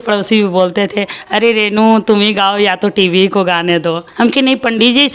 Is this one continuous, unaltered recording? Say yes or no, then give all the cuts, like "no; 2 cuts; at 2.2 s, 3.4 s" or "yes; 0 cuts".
no; 1 cut; at 4.1 s